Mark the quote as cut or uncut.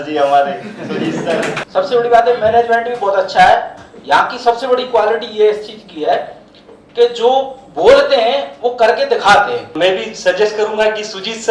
cut